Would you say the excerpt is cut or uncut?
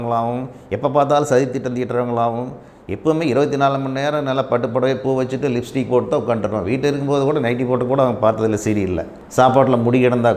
cut